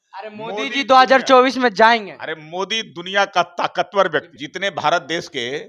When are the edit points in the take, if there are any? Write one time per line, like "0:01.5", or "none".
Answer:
0:04.4